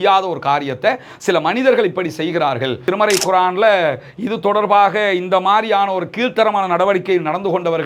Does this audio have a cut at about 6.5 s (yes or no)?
no